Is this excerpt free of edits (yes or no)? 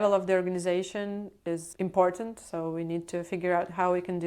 no